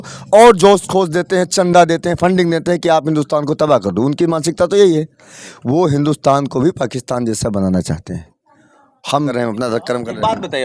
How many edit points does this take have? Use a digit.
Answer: 1